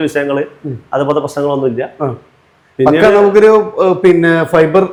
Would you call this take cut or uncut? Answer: uncut